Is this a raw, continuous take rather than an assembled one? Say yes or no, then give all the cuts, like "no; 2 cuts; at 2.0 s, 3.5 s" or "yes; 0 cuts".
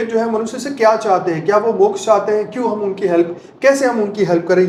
yes; 0 cuts